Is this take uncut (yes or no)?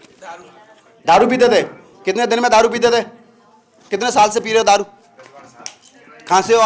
yes